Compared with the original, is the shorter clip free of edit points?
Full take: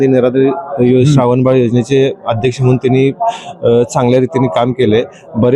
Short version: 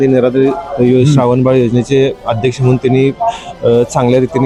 yes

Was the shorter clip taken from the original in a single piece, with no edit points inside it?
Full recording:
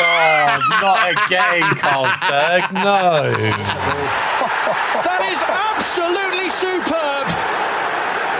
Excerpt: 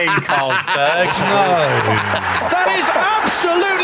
no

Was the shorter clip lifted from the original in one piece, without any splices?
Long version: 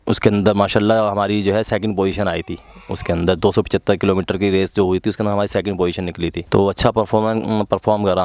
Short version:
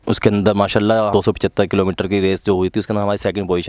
no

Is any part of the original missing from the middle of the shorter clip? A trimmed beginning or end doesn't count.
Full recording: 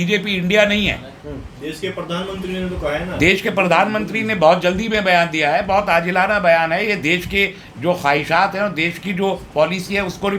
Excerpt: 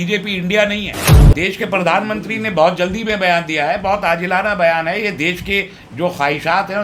yes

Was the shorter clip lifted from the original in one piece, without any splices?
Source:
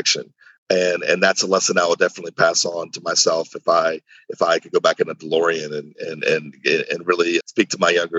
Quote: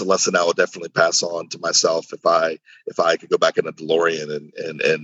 yes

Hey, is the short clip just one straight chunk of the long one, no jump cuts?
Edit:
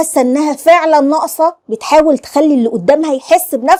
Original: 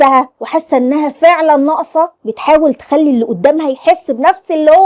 yes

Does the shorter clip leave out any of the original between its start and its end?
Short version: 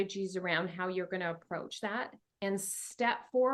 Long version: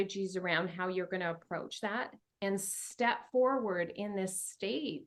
no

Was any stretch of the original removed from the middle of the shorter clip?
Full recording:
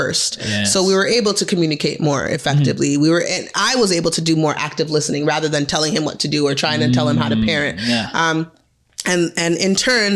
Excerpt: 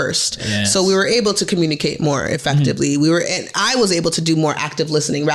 no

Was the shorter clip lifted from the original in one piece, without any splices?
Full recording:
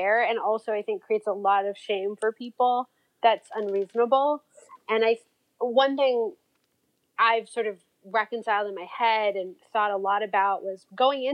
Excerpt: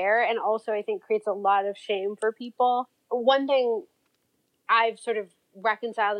no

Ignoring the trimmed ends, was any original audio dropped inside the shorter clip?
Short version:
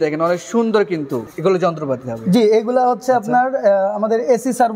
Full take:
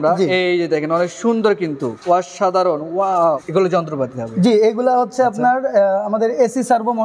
yes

